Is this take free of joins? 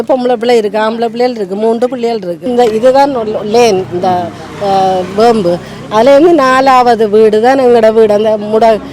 no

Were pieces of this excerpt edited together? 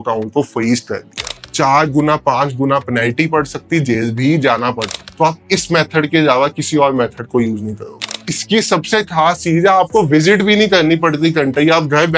yes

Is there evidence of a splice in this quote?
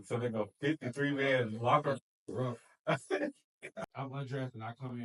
yes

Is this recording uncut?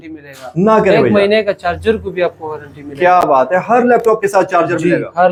yes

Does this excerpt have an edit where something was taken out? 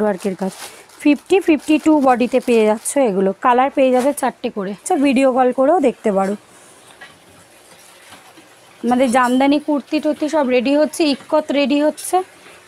yes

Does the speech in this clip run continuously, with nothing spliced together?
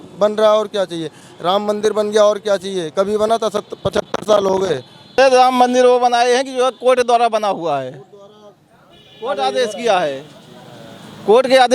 no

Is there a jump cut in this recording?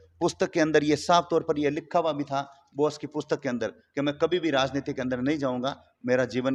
no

